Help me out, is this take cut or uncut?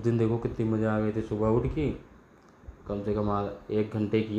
uncut